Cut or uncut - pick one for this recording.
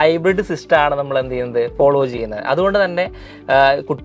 uncut